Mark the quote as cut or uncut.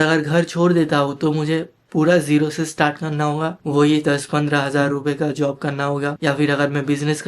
uncut